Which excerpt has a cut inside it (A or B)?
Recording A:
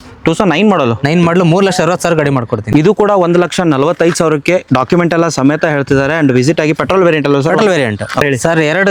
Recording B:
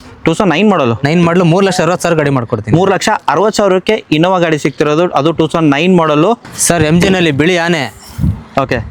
A